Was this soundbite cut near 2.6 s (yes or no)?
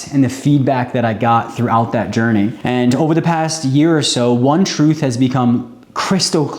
yes